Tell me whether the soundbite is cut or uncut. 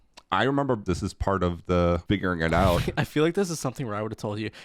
cut